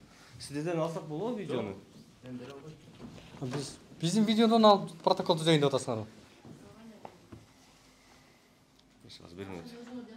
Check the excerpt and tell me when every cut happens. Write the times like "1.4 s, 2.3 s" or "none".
none